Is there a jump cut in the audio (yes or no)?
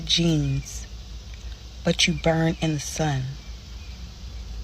no